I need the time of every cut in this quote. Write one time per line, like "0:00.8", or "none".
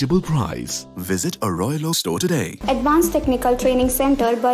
0:02.5